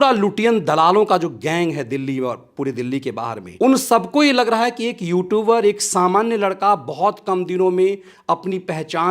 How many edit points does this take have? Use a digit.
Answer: 1